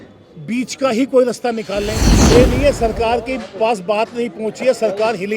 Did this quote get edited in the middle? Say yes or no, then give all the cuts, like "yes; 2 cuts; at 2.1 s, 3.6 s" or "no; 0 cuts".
yes; 1 cut; at 2.1 s